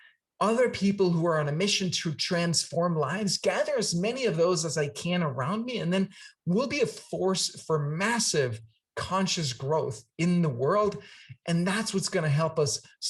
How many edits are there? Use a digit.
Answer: 0